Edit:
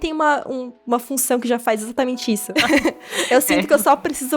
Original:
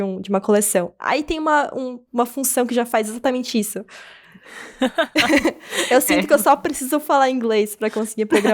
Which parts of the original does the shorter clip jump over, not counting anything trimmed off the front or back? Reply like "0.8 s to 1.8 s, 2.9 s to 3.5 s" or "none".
3.8 s to 5.1 s